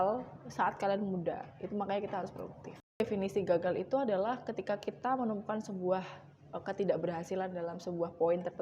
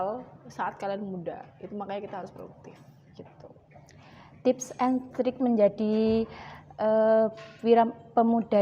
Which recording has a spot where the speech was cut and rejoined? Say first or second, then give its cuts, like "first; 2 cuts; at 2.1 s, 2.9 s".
first; 1 cut; at 3.0 s